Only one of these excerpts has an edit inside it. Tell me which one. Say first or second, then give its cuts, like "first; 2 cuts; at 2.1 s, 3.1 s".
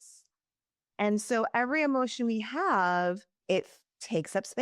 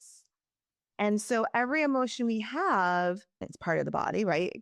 first; 1 cut; at 3.3 s